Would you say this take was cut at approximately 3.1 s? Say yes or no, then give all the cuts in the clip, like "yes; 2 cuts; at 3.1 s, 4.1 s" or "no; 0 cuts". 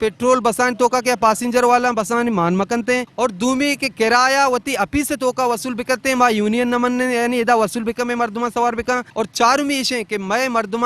yes; 2 cuts; at 3.1 s, 9.1 s